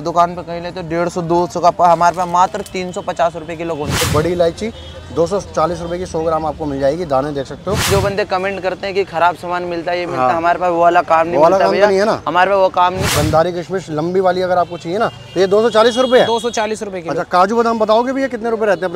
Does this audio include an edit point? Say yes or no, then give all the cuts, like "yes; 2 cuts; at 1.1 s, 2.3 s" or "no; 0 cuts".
yes; 3 cuts; at 4.0 s, 7.9 s, 13.1 s